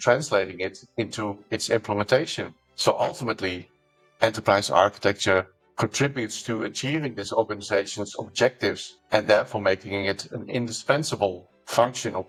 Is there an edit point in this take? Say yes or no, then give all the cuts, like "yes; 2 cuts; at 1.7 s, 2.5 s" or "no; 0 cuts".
no; 0 cuts